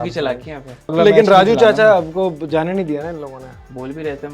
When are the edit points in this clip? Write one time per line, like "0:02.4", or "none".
0:00.9